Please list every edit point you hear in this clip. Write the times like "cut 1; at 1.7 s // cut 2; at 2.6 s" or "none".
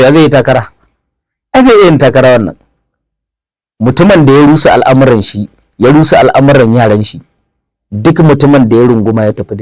none

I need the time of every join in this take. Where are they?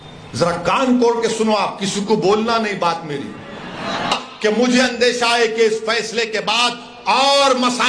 cut 1; at 4.1 s

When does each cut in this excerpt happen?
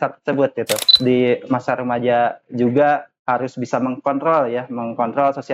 cut 1; at 0.9 s

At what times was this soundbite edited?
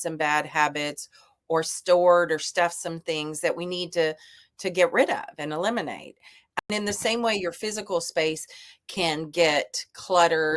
cut 1; at 6.4 s

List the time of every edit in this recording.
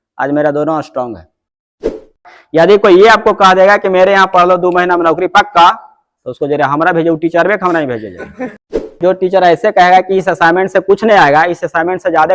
cut 1; at 2.1 s // cut 2; at 8.9 s

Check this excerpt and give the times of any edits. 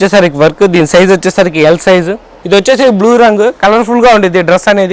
cut 1; at 2.3 s

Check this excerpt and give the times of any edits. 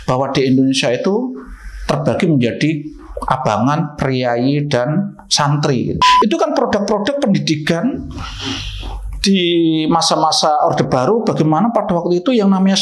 cut 1; at 6.0 s

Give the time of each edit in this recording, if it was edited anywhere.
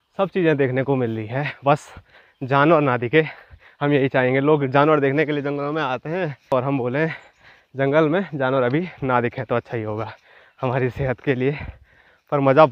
none

